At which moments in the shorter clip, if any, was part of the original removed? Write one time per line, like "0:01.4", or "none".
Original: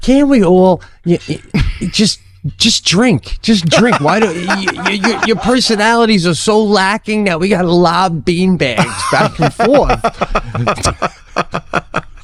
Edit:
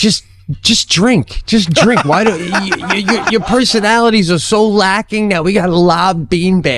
none